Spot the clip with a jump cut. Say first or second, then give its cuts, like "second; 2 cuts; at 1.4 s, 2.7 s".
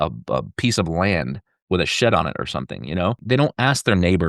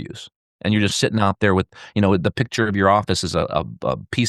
first; 1 cut; at 3.2 s